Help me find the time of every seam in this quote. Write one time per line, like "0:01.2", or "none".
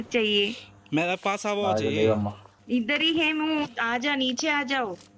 none